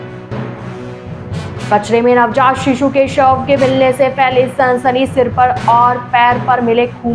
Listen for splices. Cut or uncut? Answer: cut